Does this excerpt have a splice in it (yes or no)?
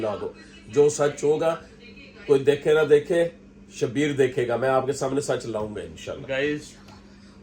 no